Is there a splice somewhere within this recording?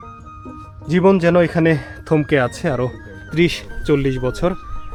no; 0 cuts

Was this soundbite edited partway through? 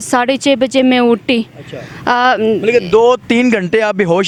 no; 0 cuts

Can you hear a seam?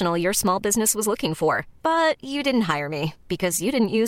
no; 0 cuts

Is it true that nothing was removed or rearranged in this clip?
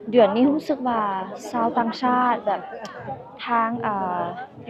yes; 0 cuts

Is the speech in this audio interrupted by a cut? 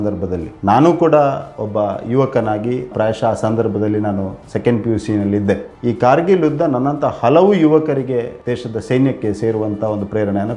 yes; 1 cut; at 8.4 s

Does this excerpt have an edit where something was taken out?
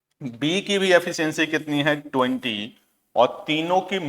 no; 0 cuts

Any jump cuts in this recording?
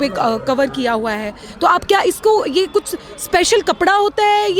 no; 0 cuts

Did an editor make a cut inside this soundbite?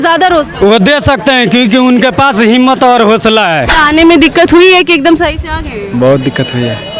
yes; 1 cut; at 3.7 s

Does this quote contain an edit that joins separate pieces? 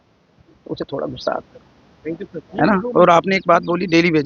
no; 0 cuts

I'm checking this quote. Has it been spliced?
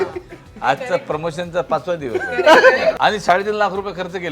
yes; 1 cut; at 3.0 s

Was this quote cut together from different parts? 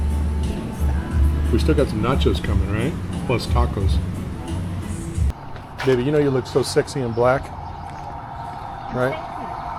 yes; 1 cut; at 5.3 s

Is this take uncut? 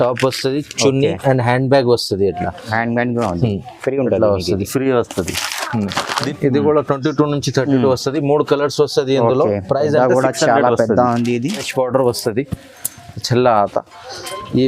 no; 2 cuts; at 6.2 s, 11.7 s

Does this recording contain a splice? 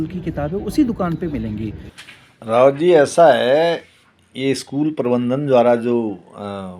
yes; 1 cut; at 1.9 s

